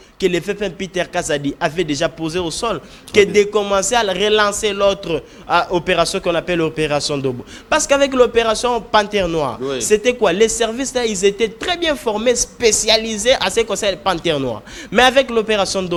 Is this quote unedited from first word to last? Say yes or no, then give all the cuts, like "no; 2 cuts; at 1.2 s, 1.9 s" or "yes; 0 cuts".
yes; 0 cuts